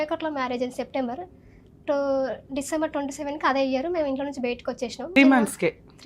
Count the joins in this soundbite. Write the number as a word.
one